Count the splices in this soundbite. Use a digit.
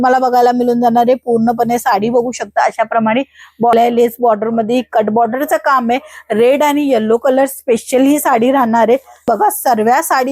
2